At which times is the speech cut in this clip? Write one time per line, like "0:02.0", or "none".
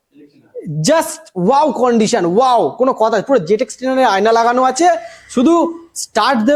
none